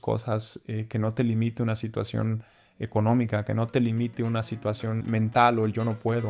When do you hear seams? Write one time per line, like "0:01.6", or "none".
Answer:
0:05.0